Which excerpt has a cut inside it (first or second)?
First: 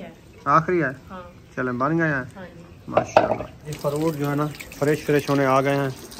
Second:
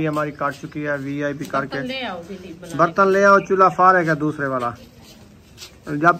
first